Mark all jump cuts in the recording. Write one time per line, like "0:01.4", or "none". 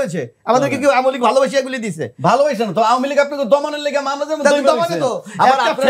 none